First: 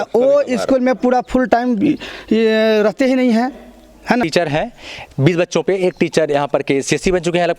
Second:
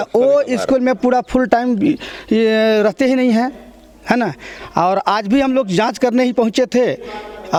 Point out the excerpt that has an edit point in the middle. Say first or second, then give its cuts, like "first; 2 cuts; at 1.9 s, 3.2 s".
first; 1 cut; at 4.2 s